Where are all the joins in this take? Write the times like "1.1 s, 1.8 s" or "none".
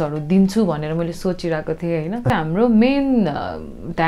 2.3 s

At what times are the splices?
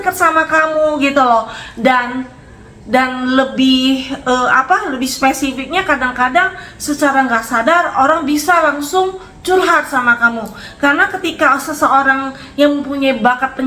none

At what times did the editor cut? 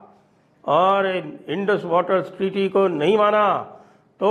none

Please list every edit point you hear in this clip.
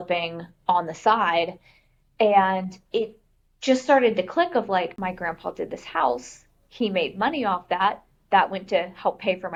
none

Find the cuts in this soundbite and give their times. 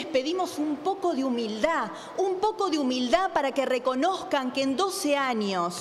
none

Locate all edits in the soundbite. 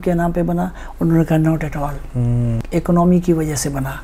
2.6 s

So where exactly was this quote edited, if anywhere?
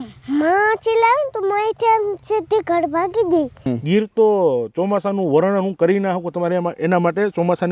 3.6 s

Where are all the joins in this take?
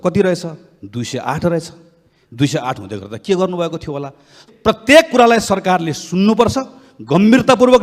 4.4 s

